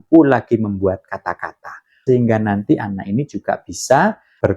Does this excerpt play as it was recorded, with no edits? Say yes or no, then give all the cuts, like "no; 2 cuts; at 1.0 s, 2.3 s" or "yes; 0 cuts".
no; 1 cut; at 2.0 s